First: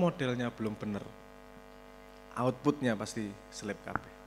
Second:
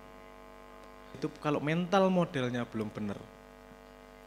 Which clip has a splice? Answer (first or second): second